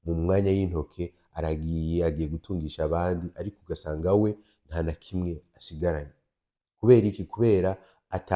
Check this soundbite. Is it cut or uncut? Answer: uncut